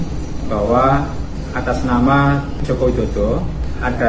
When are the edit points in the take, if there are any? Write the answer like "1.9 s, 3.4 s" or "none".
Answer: none